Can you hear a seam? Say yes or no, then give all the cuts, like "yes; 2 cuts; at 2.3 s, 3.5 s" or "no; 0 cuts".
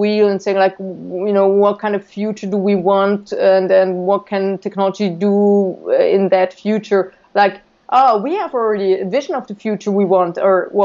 no; 0 cuts